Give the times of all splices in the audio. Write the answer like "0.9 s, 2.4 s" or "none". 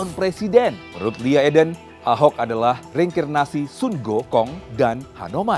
0.9 s, 1.9 s, 2.9 s, 4.6 s

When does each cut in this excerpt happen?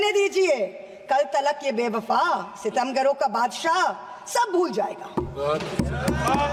none

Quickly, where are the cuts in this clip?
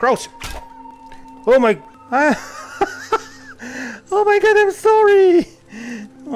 1.9 s

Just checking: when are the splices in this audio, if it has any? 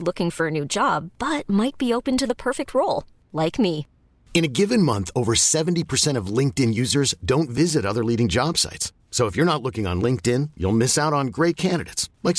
none

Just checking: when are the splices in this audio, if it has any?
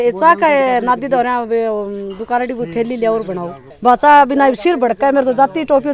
3.7 s

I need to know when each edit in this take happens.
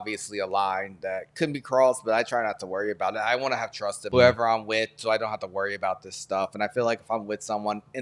4.0 s

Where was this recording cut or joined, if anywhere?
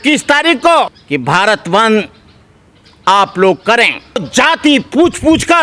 4.3 s

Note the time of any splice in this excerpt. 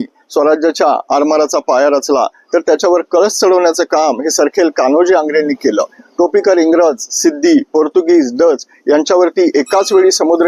none

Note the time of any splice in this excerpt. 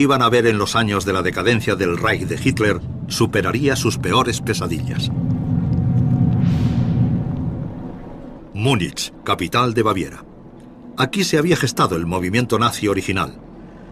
6.2 s

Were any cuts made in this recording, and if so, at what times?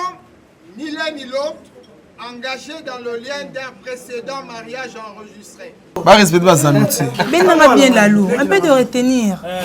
6.0 s

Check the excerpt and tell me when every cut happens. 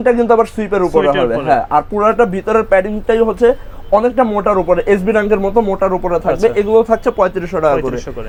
none

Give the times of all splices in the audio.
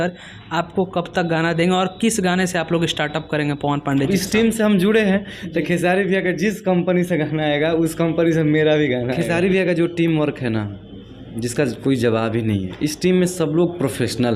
4.1 s, 9.2 s

